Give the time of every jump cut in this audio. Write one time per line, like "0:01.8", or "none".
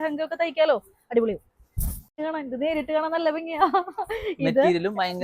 0:02.2